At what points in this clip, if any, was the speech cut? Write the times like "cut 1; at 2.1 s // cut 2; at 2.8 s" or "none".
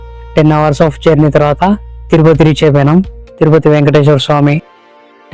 none